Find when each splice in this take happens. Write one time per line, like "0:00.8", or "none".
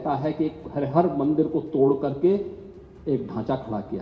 none